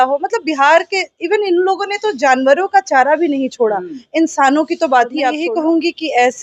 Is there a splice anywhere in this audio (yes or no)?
yes